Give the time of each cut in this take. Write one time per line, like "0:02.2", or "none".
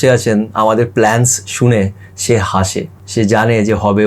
0:03.0